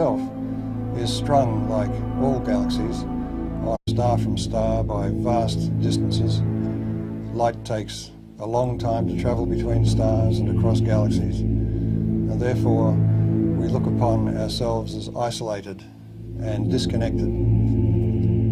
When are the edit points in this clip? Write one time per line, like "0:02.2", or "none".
none